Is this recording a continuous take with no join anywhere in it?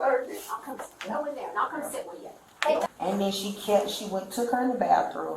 no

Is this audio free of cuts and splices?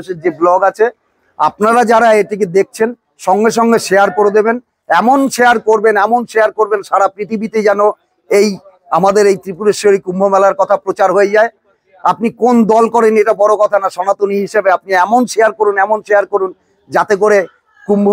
yes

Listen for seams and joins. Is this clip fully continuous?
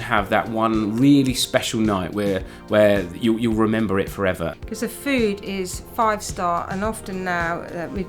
no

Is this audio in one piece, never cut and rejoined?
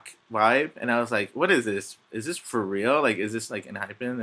yes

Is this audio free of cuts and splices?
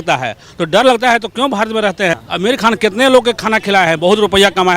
no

